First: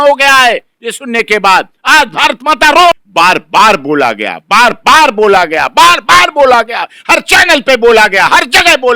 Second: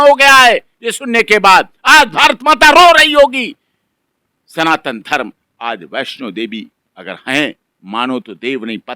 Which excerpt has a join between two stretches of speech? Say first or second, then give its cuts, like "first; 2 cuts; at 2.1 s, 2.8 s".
first; 1 cut; at 3.0 s